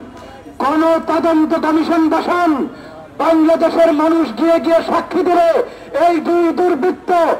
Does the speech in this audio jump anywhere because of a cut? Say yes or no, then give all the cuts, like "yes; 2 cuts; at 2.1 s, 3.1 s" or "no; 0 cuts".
no; 0 cuts